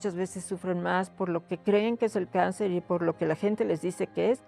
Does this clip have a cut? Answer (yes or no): no